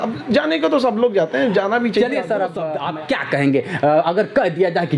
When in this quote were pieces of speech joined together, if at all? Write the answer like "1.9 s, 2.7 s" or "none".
2.6 s